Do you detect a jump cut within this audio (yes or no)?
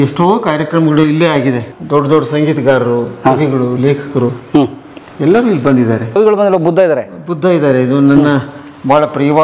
yes